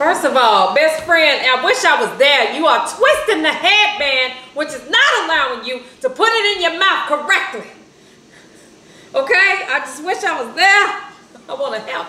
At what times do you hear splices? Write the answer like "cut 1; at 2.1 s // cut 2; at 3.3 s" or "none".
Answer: none